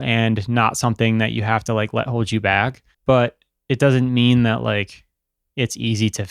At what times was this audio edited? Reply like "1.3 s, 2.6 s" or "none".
2.9 s